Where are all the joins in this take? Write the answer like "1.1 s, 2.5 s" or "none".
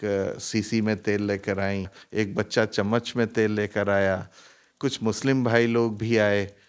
2.0 s